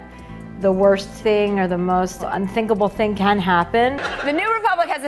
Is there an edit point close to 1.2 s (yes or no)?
no